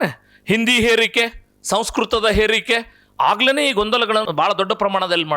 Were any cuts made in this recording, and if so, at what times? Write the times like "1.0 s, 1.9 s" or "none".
4.3 s